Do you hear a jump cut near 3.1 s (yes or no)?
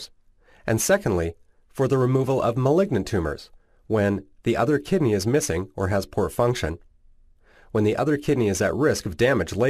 yes